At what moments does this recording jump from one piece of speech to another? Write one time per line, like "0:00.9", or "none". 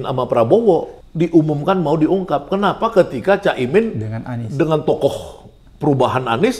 0:01.0